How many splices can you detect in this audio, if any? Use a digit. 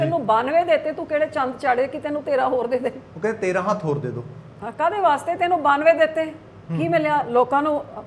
0